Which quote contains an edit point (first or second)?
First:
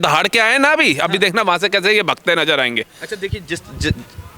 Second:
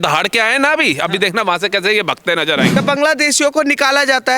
second